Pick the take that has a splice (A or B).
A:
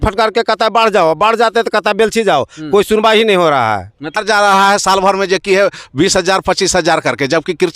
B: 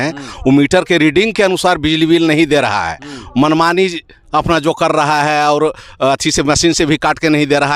A